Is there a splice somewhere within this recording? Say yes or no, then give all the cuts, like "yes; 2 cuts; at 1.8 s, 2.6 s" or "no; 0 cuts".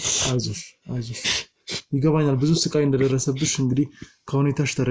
no; 0 cuts